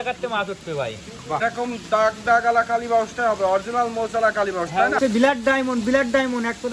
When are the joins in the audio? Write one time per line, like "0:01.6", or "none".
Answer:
0:01.4
0:05.0

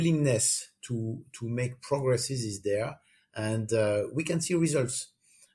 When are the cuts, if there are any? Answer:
none

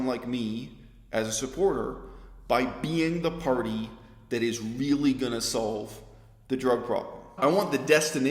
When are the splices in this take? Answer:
0:07.3

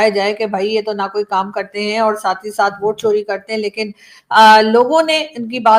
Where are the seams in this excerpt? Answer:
none

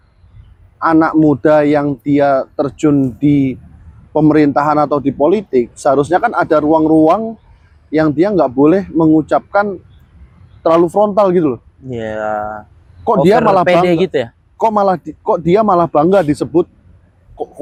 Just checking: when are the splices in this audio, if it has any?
none

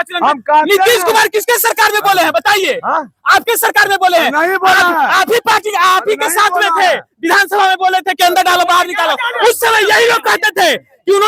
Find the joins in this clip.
none

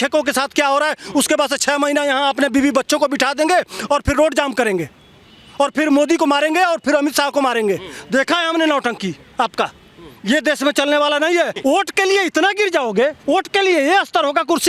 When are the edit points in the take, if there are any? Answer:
0:11.5
0:13.2

